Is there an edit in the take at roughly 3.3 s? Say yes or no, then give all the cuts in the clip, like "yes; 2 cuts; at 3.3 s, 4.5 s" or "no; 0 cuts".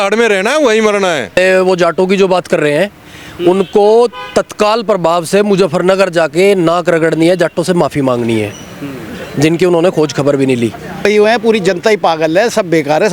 no; 2 cuts; at 1.3 s, 11.0 s